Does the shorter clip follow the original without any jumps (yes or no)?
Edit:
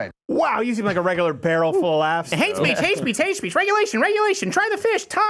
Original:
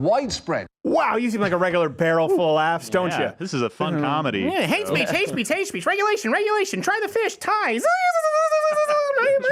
no